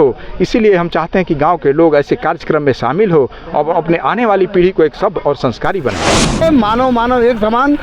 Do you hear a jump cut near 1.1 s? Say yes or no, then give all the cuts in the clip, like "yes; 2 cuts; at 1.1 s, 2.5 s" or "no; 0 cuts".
no; 1 cut; at 6.4 s